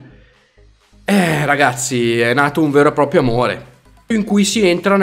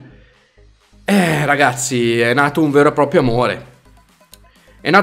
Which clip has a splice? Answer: second; 1 cut; at 4.1 s

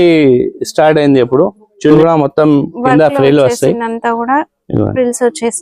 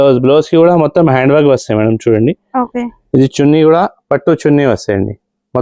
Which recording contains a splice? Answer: first; 1 cut; at 1.9 s

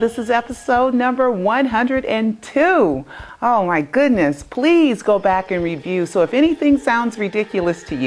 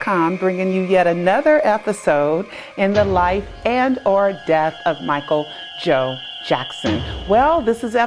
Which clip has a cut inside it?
first; 1 cut; at 2.0 s

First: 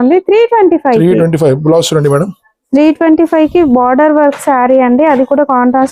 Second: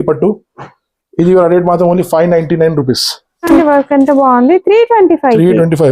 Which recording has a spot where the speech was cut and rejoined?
second; 1 cut; at 3.5 s

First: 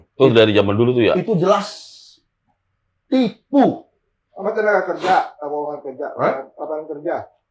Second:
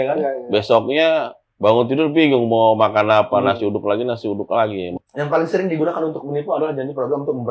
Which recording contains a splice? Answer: second; 1 cut; at 4.9 s

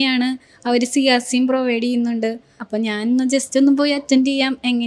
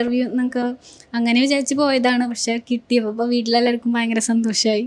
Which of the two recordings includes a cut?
first; 1 cut; at 2.6 s

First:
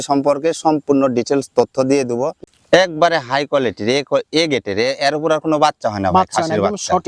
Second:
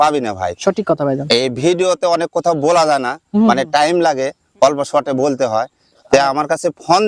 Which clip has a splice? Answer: first; 1 cut; at 2.4 s

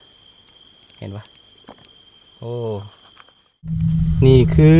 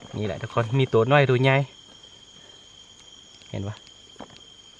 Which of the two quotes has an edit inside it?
first; 1 cut; at 3.9 s

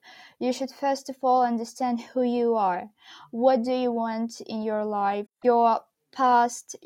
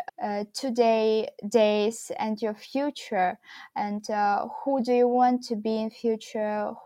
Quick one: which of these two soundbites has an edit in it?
first; 1 cut; at 5.3 s

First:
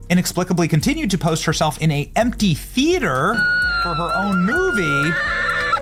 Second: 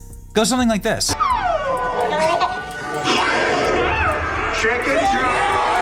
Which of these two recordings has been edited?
second; 1 cut; at 1.1 s

